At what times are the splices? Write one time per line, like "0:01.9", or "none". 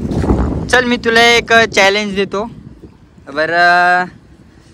none

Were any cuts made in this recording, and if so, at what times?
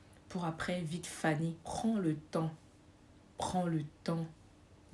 0:01.6

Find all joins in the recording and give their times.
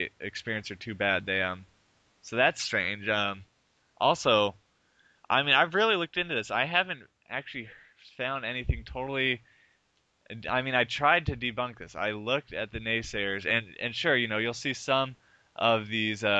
0:06.5

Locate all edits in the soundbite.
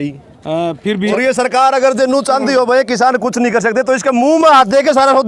0:01.1

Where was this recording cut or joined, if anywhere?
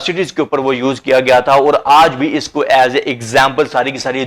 none

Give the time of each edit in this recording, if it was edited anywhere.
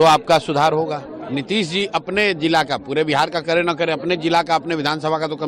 0:01.1

